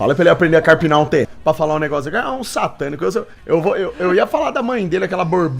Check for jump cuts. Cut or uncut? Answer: cut